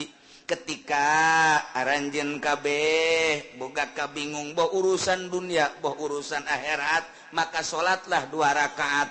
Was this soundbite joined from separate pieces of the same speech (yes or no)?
no